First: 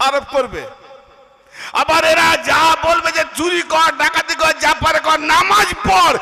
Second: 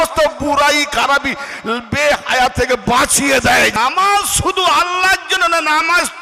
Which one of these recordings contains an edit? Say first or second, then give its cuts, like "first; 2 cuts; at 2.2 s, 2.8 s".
second; 1 cut; at 3.7 s